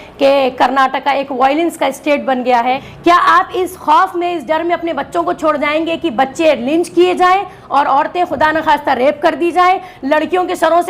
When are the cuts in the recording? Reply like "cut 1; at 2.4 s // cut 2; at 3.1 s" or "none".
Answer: cut 1; at 2.9 s